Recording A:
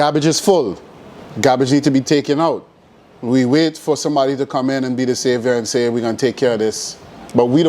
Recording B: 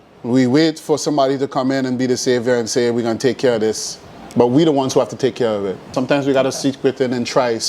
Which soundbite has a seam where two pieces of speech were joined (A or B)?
B